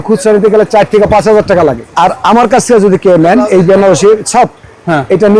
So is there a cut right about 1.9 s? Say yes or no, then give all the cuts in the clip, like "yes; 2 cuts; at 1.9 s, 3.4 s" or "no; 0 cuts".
yes; 1 cut; at 1.9 s